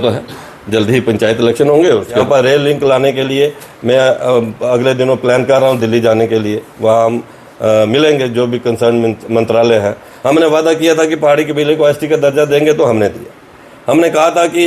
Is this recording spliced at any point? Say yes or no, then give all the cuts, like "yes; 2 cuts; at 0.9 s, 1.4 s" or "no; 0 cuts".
yes; 2 cuts; at 2.2 s, 10.1 s